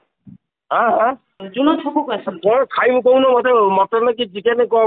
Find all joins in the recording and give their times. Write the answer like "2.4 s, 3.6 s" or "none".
1.4 s